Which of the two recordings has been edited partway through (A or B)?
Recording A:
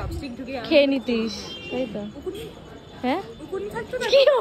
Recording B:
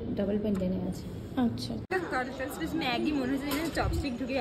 B